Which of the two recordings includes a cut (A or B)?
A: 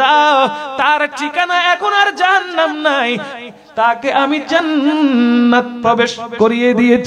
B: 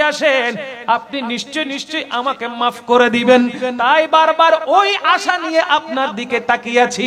A